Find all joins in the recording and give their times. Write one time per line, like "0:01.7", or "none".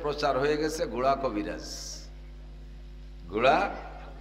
none